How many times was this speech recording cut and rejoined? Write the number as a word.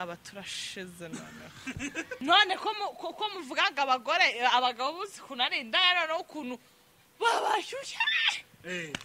one